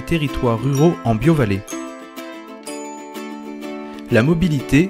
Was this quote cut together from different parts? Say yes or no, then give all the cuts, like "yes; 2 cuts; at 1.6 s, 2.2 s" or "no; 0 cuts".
no; 0 cuts